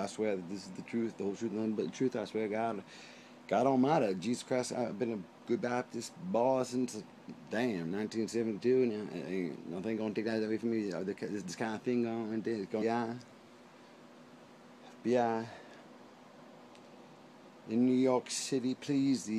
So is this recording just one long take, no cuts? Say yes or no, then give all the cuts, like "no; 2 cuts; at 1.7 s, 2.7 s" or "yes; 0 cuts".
yes; 0 cuts